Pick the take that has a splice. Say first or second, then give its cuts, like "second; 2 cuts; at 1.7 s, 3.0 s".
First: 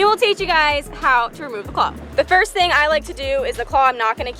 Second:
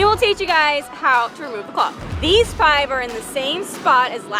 second; 1 cut; at 2.0 s